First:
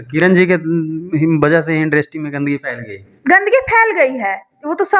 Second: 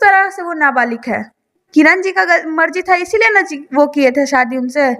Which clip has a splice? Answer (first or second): second